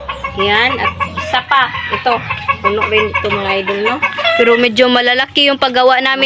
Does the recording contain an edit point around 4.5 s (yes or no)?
no